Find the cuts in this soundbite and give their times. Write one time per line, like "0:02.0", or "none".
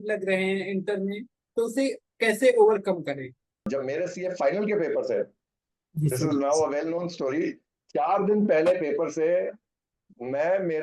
0:03.7